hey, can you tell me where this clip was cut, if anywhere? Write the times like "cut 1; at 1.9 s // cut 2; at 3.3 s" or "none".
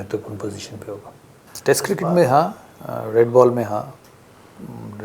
cut 1; at 1.4 s